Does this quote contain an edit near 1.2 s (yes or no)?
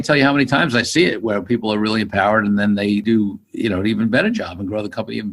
no